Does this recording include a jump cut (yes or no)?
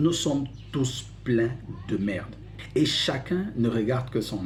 no